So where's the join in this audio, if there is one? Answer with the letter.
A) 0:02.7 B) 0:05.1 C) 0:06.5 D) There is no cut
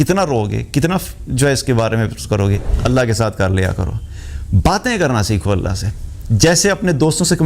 A